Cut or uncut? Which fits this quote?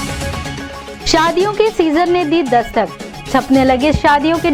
uncut